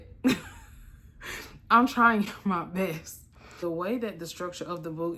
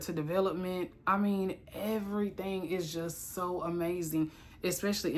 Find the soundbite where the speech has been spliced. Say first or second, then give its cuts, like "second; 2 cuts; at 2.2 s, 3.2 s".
first; 1 cut; at 3.6 s